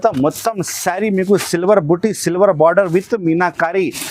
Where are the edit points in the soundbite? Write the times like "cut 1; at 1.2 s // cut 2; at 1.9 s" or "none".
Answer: none